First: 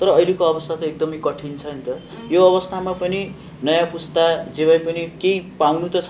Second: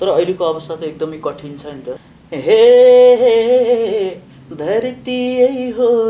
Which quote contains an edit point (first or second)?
second